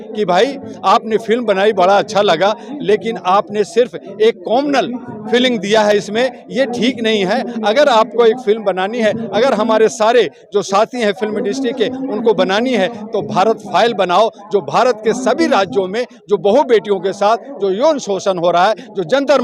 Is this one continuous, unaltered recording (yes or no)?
yes